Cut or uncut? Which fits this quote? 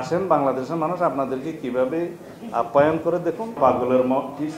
cut